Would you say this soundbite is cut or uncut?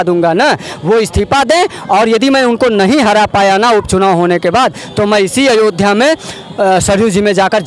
uncut